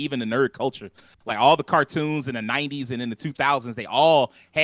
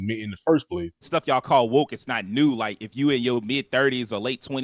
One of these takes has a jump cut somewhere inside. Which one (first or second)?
second